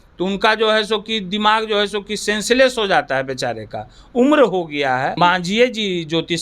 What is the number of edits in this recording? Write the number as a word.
one